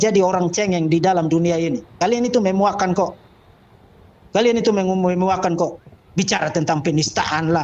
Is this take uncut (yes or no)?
yes